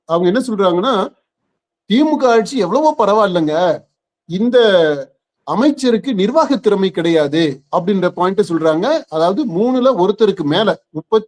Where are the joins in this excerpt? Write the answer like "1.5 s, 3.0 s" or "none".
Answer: none

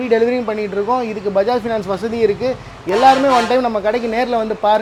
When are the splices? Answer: none

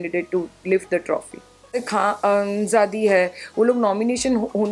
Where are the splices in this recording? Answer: 1.8 s

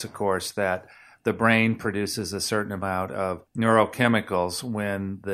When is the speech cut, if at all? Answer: 3.4 s

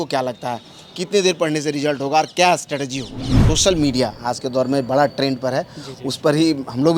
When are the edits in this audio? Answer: 3.4 s

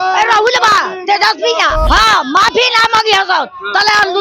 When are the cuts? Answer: 1.9 s

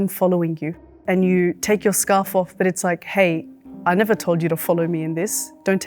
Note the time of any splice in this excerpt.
0.9 s

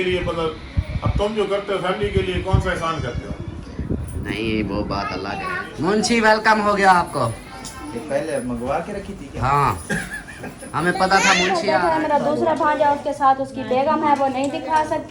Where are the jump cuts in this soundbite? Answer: 5.4 s, 11.6 s

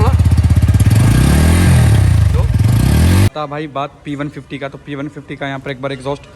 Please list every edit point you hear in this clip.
3.3 s

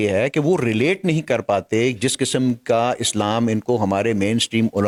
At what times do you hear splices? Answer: none

